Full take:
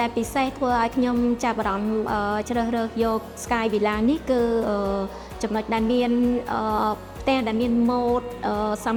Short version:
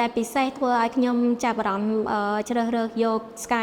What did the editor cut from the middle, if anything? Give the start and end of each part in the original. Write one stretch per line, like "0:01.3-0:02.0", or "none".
none